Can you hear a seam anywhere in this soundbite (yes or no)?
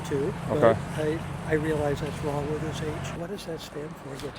yes